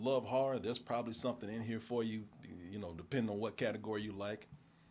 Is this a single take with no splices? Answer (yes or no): yes